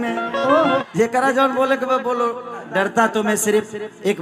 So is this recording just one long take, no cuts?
no; 2 cuts; at 0.8 s, 2.7 s

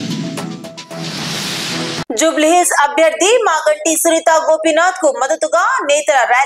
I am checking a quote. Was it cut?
yes; 1 cut; at 1.9 s

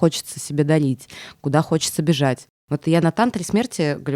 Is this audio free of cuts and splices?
yes; 0 cuts

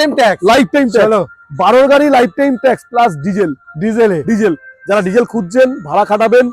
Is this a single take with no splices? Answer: yes; 0 cuts

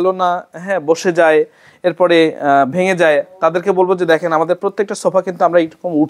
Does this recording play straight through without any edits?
yes; 0 cuts

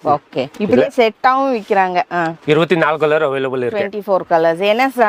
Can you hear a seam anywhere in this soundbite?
no; 0 cuts

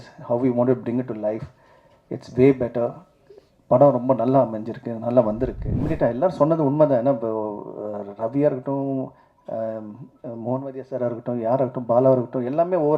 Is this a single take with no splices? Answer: no; 1 cut; at 5.7 s

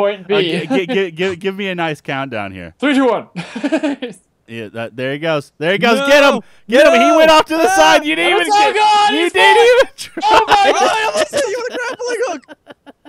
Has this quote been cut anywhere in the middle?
yes; 1 cut; at 2.6 s

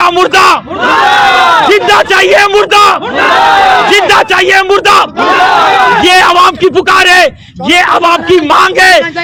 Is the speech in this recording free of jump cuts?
yes; 0 cuts

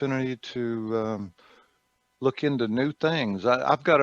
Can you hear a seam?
no; 0 cuts

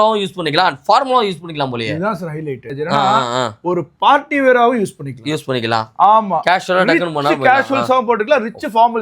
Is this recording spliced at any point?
yes; 1 cut; at 2.7 s

